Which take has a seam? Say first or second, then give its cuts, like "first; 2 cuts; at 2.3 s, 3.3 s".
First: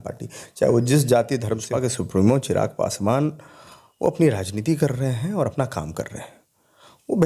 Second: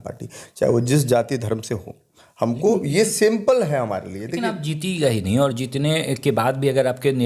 first; 1 cut; at 1.7 s